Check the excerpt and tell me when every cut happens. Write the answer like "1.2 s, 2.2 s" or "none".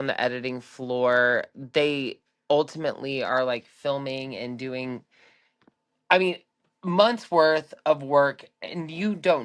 none